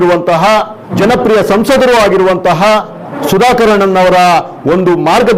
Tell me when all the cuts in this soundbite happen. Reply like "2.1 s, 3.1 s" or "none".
0.9 s, 3.1 s